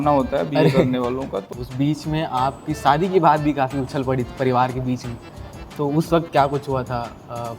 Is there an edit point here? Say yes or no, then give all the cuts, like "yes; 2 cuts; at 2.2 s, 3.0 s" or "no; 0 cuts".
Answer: yes; 1 cut; at 1.4 s